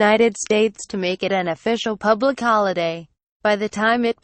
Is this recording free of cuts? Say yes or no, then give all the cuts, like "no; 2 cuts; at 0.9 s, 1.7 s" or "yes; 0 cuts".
no; 1 cut; at 1.4 s